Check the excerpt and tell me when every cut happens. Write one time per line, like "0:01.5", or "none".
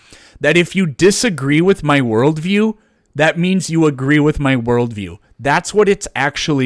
none